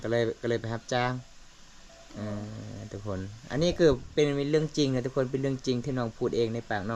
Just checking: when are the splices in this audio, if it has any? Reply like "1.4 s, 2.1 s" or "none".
none